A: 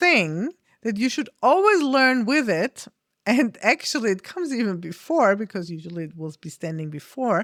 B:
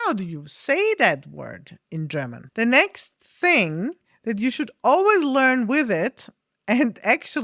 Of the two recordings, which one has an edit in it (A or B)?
B